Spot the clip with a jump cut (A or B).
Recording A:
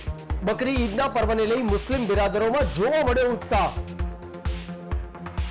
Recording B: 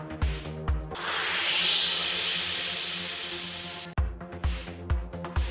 B